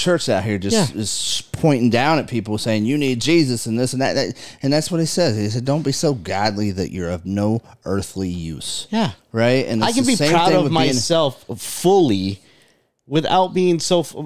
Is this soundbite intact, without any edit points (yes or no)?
yes